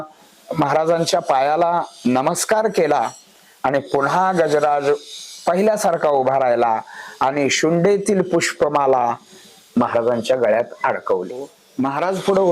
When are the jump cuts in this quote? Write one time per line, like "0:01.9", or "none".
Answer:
0:11.6

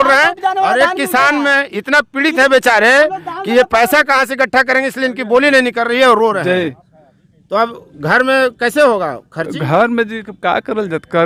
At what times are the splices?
none

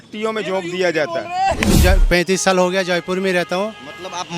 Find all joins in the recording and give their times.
0:01.7

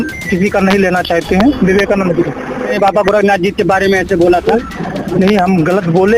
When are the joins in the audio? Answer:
0:01.6
0:02.7
0:04.8

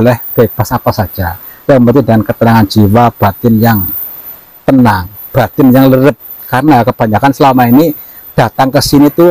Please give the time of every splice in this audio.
none

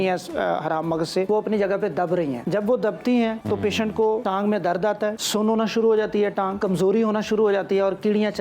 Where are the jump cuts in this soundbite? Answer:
0:01.3
0:02.4
0:03.8
0:05.2
0:06.6

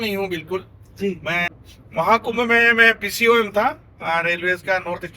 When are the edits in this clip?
0:01.5

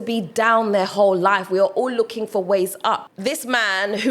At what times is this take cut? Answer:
0:03.1

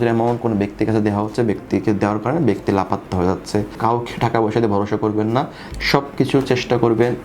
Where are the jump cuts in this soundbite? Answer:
0:03.8

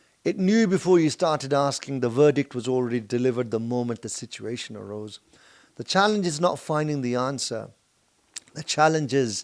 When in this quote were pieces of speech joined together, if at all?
none

